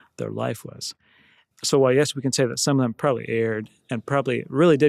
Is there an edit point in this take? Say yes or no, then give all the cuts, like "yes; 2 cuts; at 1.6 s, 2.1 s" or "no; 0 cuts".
yes; 1 cut; at 1.4 s